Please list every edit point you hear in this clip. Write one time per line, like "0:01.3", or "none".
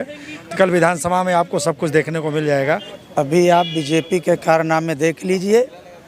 0:03.0